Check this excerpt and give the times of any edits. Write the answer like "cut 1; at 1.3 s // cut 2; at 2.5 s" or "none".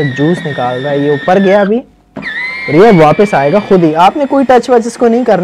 none